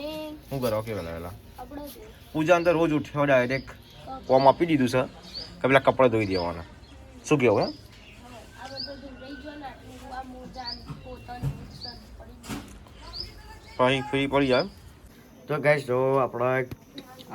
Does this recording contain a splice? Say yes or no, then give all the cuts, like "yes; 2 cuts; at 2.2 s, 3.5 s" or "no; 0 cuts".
yes; 1 cut; at 15.0 s